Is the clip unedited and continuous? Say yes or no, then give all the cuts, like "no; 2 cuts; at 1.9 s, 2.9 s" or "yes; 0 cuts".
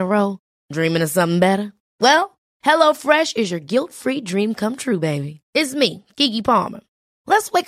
yes; 0 cuts